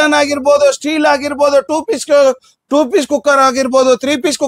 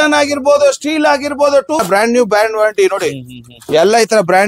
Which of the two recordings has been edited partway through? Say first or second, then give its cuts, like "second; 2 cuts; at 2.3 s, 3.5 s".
second; 1 cut; at 1.8 s